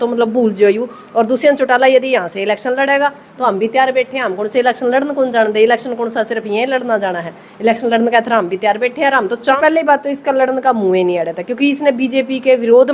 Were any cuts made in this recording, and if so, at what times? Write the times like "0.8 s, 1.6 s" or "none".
9.6 s